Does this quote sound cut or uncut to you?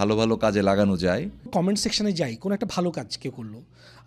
cut